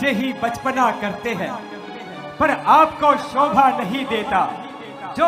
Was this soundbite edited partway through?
no; 0 cuts

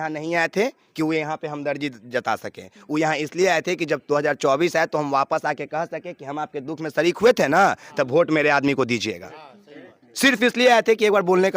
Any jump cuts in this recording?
no; 0 cuts

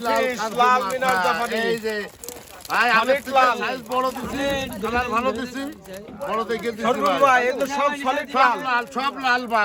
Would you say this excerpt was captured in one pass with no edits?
yes; 0 cuts

